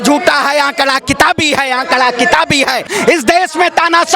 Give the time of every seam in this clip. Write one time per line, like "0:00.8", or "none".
0:02.9